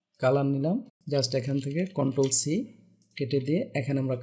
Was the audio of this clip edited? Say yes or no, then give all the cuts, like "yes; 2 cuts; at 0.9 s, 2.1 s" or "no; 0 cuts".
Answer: yes; 1 cut; at 1.0 s